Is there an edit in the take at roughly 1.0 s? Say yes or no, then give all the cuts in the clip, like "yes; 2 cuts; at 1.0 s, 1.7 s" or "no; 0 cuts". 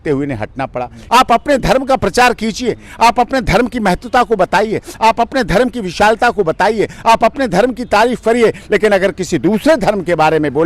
yes; 1 cut; at 1.0 s